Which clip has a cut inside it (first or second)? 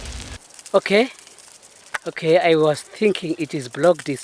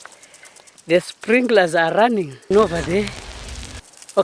second